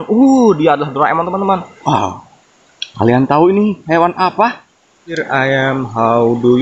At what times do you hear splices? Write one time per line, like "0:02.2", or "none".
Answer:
0:01.7
0:05.2

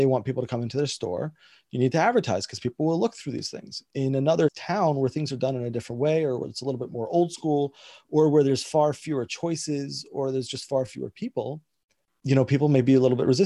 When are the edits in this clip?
none

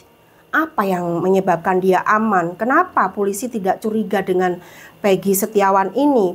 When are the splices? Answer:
none

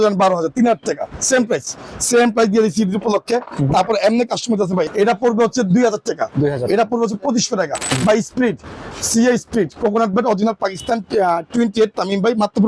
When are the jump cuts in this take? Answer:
0:04.9
0:08.0

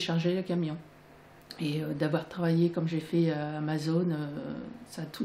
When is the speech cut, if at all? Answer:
0:01.4

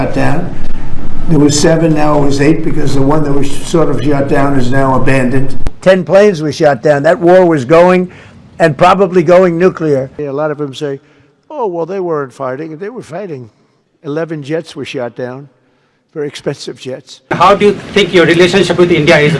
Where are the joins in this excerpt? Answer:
0:05.7
0:10.2
0:17.3

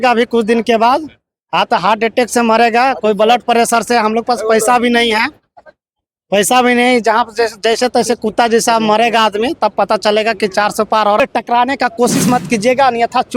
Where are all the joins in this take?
0:11.2

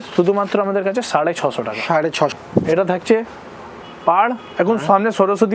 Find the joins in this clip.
0:02.3

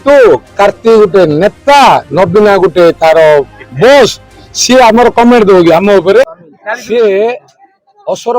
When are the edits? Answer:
0:05.0

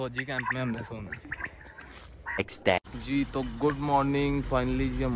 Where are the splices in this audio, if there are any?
0:02.4

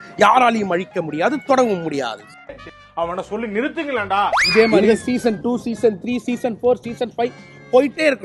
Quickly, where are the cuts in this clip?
0:04.4

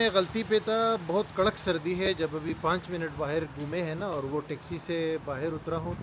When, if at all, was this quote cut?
none

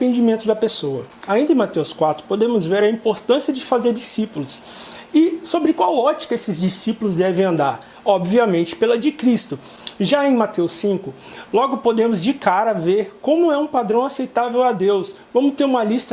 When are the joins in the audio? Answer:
none

